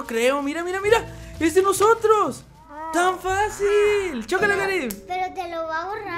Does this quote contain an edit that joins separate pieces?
no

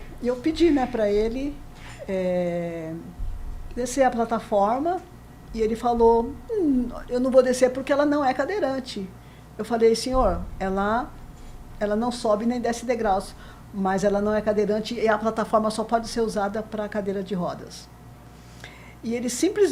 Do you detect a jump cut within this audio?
no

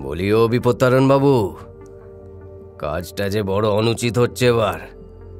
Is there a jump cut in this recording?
no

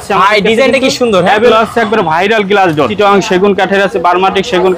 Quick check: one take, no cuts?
no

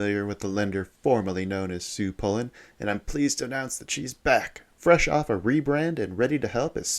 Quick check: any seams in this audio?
no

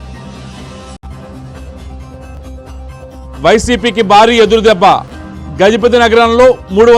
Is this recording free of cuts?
no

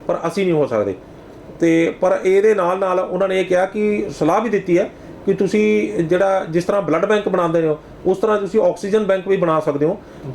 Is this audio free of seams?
yes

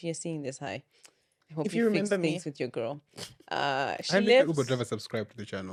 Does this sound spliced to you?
no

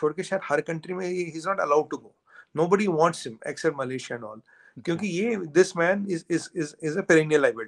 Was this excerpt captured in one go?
yes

